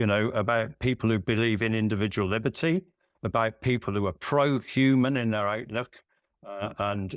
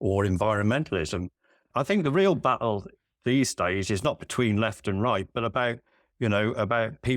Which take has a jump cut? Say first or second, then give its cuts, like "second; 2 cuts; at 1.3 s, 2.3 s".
second; 1 cut; at 1.7 s